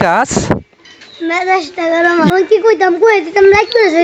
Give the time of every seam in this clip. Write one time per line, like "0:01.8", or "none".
0:02.3